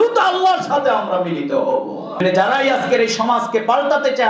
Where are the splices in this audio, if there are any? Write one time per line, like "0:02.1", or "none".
0:02.2